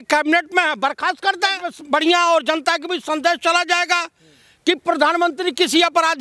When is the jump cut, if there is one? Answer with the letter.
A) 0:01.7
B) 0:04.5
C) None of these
A